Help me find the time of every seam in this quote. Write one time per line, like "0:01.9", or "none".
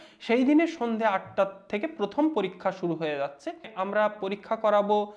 0:03.7